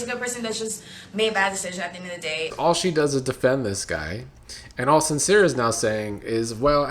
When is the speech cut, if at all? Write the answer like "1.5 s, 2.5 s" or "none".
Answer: 2.5 s